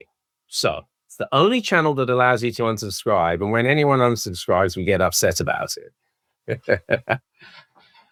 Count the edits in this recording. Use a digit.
0